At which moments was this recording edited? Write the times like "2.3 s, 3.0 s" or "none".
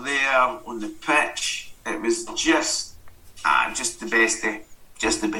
none